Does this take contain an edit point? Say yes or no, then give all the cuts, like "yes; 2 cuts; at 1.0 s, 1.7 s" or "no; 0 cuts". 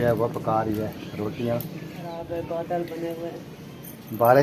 yes; 1 cut; at 2.1 s